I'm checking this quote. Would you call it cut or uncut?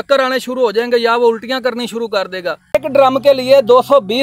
cut